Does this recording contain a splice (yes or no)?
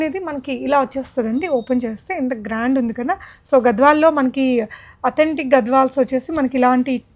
no